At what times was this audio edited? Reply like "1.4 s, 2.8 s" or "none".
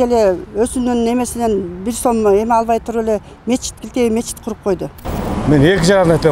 5.0 s